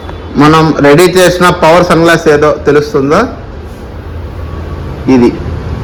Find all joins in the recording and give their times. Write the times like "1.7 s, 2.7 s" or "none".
none